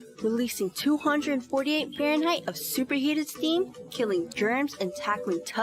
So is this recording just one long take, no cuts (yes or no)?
yes